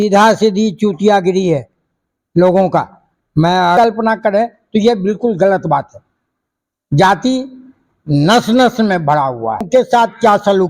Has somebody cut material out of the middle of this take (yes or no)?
yes